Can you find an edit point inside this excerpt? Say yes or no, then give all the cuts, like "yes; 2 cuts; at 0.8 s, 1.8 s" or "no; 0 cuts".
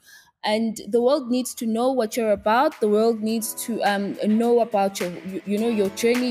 no; 0 cuts